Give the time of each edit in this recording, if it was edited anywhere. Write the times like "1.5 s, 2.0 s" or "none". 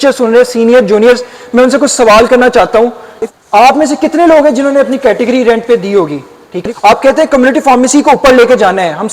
3.1 s, 6.5 s